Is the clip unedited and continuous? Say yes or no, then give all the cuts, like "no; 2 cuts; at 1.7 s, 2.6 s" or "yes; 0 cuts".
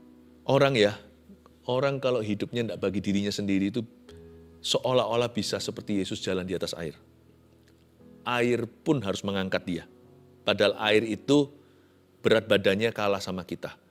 yes; 0 cuts